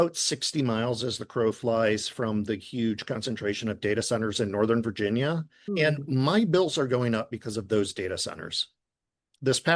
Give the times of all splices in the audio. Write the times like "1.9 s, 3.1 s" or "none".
none